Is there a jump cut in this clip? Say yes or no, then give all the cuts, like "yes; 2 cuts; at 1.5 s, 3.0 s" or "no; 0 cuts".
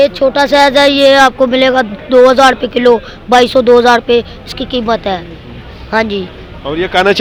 no; 0 cuts